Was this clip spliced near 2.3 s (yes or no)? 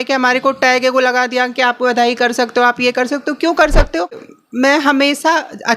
no